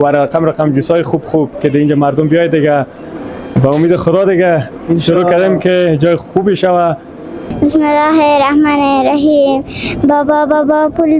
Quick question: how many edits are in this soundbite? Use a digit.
1